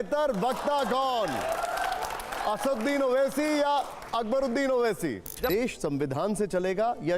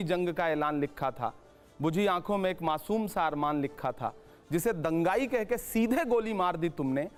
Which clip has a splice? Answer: first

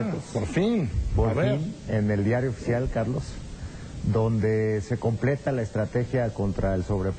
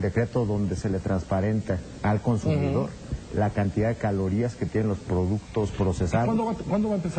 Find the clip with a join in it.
first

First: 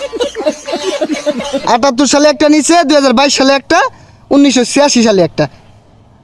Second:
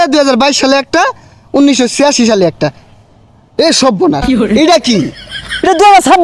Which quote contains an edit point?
first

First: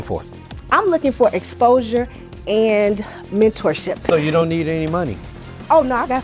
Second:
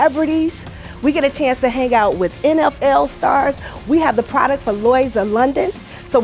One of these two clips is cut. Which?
first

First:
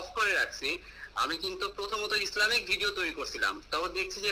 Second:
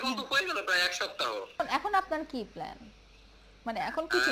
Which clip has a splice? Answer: second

